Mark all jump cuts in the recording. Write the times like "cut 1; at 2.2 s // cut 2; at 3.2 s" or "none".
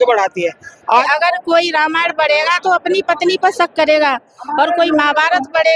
cut 1; at 1.0 s